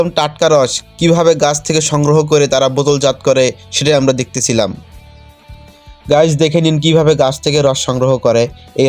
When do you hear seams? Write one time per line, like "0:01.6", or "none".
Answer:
none

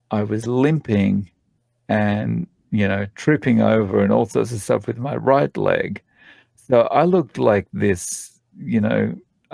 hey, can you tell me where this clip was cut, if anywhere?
none

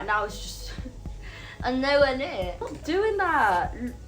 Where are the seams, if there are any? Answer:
0:02.6

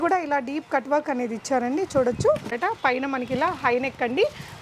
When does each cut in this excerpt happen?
0:02.5

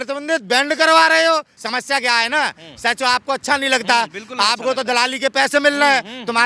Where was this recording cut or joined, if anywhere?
0:01.6

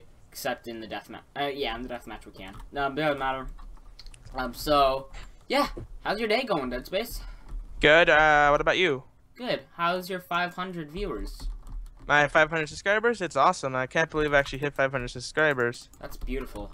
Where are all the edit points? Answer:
0:13.7

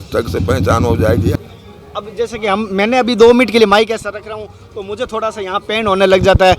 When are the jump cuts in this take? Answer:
0:01.4

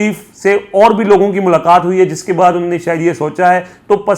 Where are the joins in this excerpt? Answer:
none

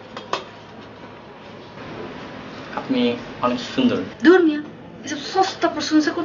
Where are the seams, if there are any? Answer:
0:02.7

